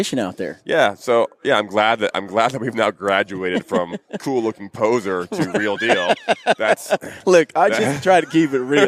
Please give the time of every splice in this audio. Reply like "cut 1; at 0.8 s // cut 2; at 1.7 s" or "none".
none